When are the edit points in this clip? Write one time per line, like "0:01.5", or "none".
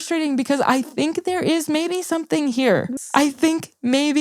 0:03.0